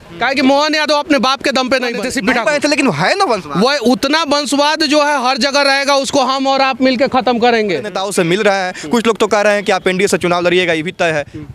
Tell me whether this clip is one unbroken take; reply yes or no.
no